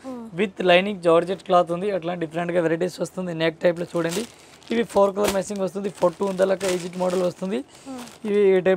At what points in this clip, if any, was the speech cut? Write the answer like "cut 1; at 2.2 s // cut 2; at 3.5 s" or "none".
none